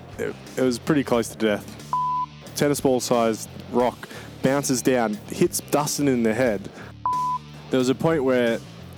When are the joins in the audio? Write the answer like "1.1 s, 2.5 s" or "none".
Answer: 2.0 s, 7.1 s